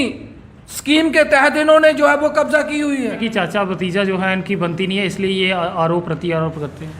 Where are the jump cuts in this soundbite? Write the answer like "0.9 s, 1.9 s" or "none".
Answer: 3.2 s